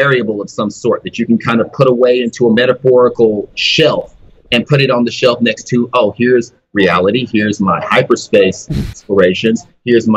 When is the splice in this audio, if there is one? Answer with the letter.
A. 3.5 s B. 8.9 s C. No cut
B